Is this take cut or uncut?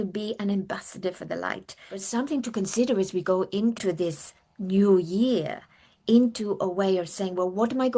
cut